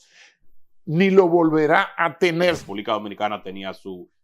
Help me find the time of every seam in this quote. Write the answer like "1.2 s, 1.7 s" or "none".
2.6 s